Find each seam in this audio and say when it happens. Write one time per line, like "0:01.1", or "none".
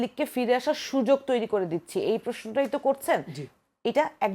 none